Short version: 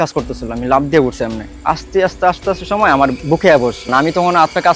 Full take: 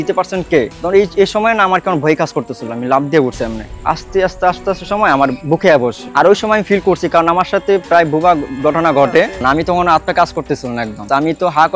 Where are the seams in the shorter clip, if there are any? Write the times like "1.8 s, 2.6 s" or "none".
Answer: 3.8 s